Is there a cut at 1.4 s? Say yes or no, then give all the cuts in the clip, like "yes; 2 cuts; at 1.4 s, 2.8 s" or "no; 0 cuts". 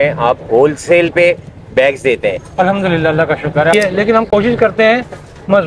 no; 1 cut; at 3.7 s